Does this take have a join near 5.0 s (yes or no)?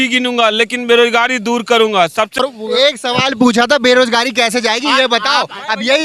no